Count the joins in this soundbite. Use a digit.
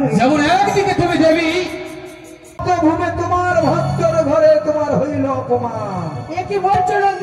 1